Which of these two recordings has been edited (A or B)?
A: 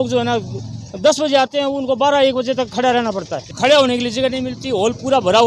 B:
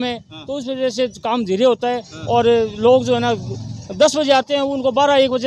A